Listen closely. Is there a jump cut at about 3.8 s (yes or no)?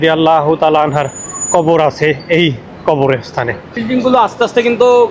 yes